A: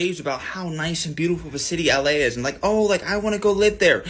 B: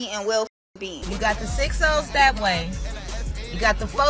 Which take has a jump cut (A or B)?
B